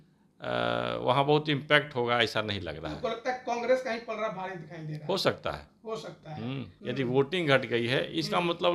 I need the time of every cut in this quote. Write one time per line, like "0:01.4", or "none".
0:06.7